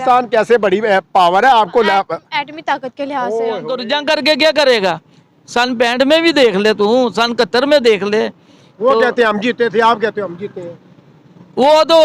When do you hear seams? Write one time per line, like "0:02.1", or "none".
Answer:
0:03.8